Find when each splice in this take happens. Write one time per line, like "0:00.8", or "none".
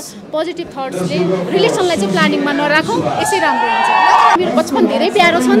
0:04.4